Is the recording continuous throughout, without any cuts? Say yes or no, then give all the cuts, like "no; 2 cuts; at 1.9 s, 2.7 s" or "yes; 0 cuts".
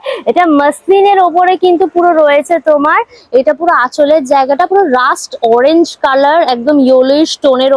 yes; 0 cuts